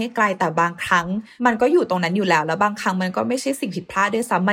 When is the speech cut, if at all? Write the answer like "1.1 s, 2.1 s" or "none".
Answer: 1.3 s